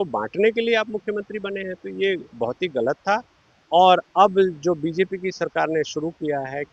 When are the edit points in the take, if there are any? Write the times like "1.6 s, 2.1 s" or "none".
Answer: none